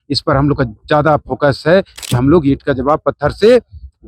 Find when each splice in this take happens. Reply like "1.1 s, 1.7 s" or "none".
2.0 s